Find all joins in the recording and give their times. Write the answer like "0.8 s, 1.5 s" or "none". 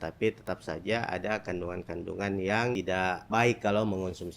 3.3 s